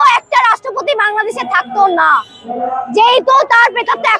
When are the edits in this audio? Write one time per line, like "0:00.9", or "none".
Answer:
none